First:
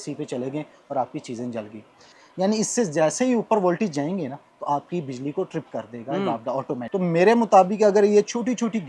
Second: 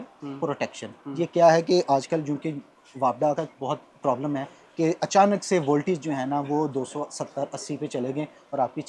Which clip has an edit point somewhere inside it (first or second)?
first